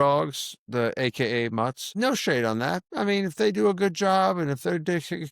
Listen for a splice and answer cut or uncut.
cut